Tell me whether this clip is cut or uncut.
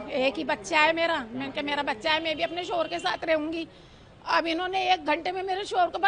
uncut